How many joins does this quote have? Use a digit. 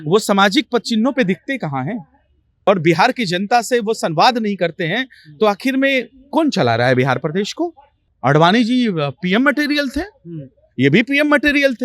2